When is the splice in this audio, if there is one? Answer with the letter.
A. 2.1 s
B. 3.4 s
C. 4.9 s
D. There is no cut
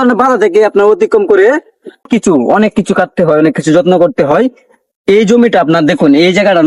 A